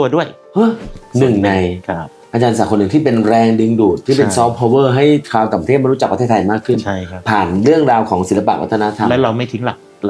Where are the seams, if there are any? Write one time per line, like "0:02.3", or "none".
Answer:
0:00.9

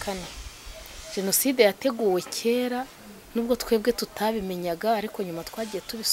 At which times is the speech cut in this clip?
none

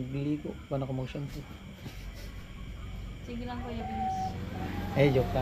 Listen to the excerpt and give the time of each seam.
none

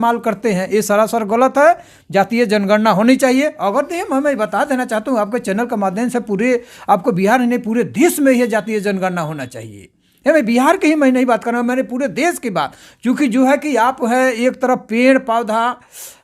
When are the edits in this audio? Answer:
none

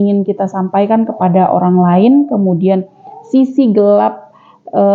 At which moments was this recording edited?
none

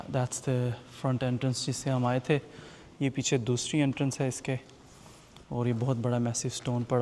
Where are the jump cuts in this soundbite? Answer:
none

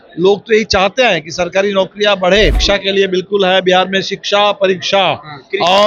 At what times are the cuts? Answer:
0:02.6

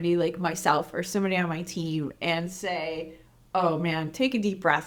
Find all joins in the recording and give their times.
none

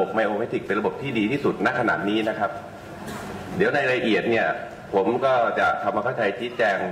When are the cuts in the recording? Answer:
none

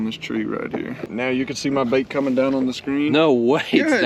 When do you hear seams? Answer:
0:01.0

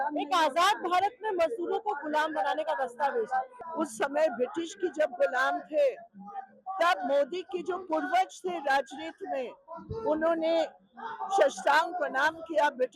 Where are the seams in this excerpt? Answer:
0:03.6

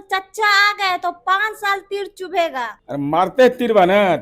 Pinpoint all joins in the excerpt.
0:02.8

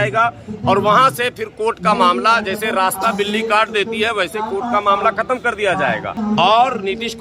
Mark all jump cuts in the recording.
0:06.1

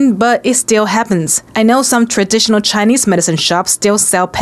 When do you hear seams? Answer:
none

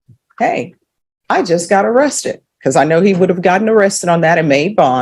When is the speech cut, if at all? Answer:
none

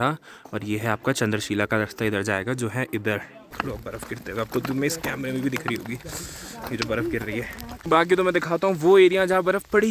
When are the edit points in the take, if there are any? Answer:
0:03.4
0:07.7

